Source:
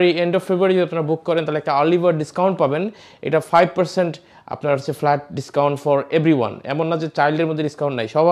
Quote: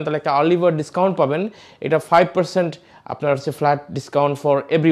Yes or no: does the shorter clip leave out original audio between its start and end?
no